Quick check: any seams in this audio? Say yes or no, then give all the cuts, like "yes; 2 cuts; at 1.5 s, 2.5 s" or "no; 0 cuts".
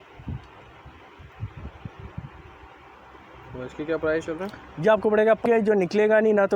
yes; 1 cut; at 5.4 s